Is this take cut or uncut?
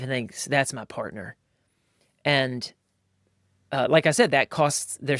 uncut